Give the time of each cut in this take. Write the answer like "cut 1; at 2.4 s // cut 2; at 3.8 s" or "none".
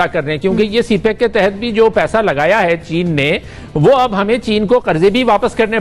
none